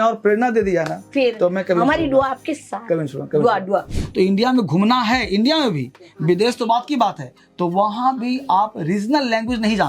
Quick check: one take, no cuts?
no; 1 cut; at 3.9 s

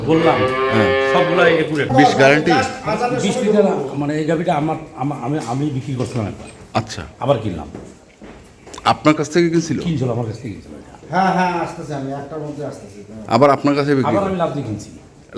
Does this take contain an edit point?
yes; 1 cut; at 1.9 s

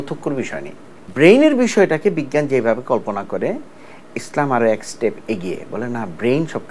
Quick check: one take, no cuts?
no; 1 cut; at 1.1 s

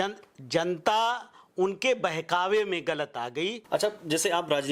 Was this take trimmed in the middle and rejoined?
yes; 1 cut; at 3.6 s

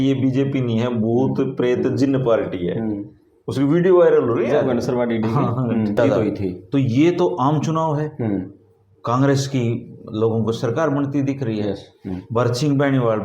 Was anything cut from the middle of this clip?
yes; 1 cut; at 6.0 s

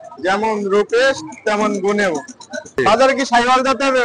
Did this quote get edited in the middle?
yes; 1 cut; at 2.8 s

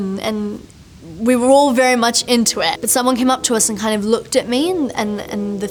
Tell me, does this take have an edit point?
no; 0 cuts

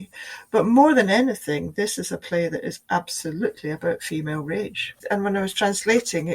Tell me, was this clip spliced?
yes; 1 cut; at 5.0 s

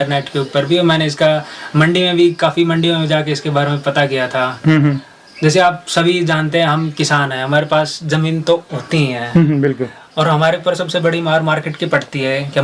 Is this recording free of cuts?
yes; 0 cuts

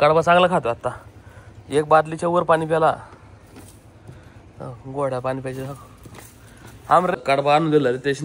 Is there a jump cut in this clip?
yes; 1 cut; at 7.2 s

